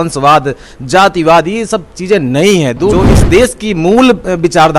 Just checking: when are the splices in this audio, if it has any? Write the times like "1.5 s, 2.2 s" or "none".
3.0 s

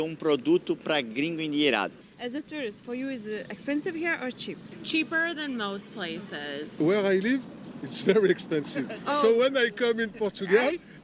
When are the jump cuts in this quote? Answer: 2.0 s, 4.8 s, 6.7 s

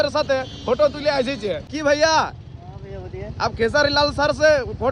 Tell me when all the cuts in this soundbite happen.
1.6 s

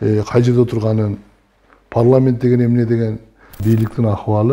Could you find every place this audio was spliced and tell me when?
3.6 s

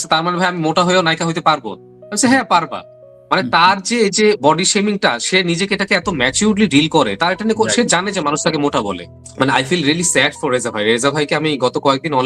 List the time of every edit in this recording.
9.3 s

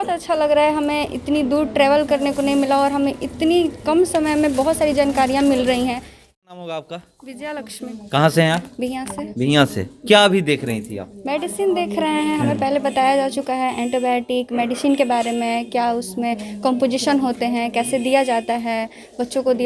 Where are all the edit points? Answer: 6.2 s

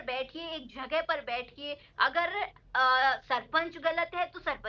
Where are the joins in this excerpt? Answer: none

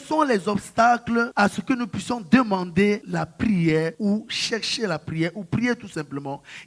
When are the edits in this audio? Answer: 1.3 s, 3.1 s, 4.0 s

